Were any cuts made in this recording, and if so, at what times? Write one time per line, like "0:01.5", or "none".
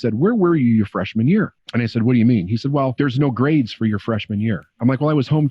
0:02.9